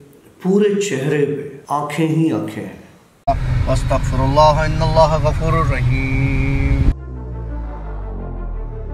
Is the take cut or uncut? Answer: cut